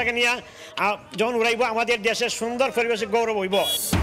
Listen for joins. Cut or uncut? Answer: uncut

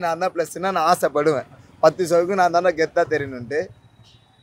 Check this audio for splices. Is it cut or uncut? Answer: uncut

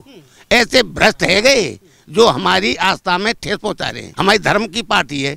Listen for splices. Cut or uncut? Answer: cut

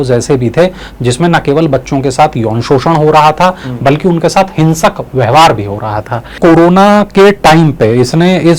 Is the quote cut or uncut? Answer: cut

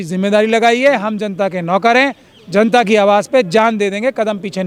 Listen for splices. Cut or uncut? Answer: uncut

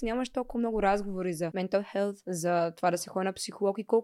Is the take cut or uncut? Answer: cut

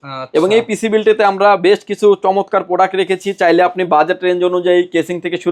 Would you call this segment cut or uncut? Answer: uncut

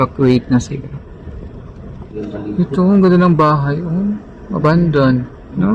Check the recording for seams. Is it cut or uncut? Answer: cut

